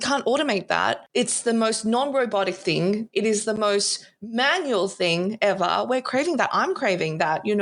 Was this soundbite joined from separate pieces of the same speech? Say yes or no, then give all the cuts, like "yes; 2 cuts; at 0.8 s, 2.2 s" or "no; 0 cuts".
yes; 1 cut; at 1.0 s